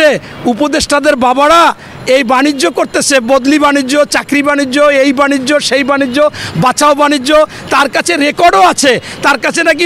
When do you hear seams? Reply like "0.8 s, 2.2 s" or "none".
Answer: none